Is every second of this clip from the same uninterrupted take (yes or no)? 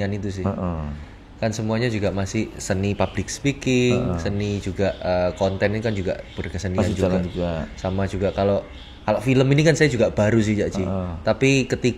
yes